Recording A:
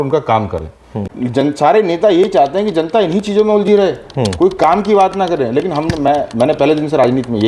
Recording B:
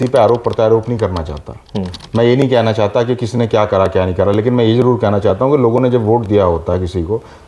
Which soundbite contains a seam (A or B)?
A